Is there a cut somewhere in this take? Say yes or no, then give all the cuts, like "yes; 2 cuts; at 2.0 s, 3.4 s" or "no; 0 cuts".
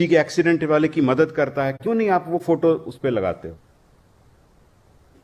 no; 0 cuts